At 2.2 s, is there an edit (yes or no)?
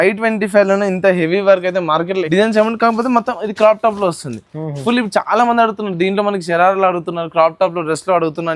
yes